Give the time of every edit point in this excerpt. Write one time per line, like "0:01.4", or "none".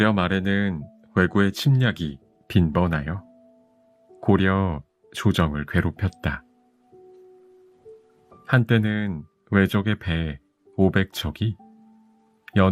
0:06.5
0:08.4